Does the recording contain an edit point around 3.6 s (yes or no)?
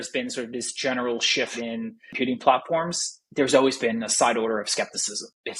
no